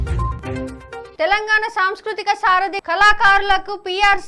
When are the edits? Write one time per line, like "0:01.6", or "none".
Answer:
0:01.0